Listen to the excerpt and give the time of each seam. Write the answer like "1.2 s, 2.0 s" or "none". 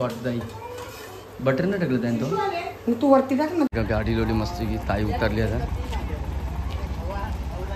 3.7 s